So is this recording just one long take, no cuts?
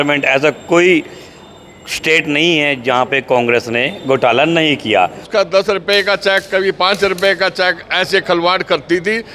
no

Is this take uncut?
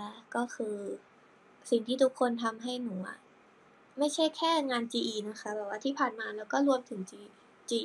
yes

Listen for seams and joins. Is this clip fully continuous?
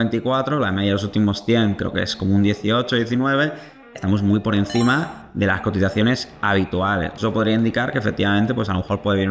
yes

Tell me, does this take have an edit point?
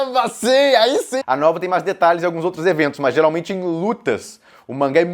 yes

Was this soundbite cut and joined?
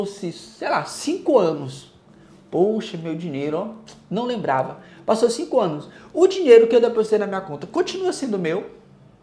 no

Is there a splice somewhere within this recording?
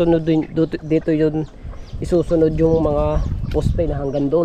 no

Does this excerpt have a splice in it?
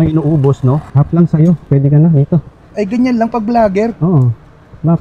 no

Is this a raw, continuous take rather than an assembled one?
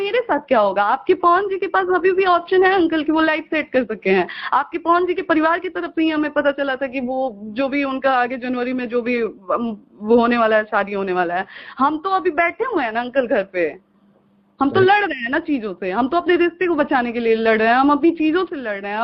yes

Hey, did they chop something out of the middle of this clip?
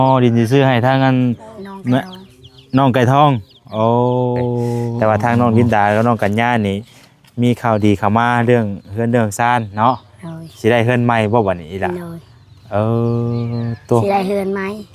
yes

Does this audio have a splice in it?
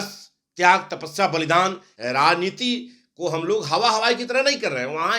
yes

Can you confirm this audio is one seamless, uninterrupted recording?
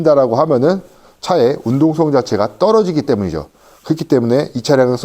yes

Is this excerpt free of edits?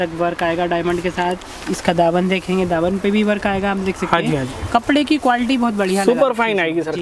yes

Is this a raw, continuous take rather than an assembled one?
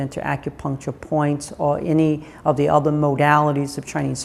yes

